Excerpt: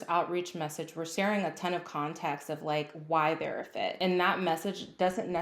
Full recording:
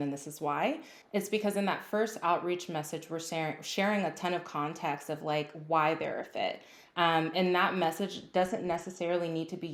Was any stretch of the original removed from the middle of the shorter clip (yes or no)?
yes